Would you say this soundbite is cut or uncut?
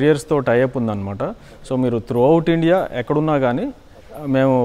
uncut